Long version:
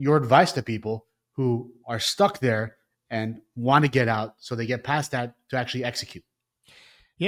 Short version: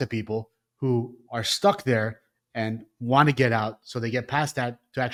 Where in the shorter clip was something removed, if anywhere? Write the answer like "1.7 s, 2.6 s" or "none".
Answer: none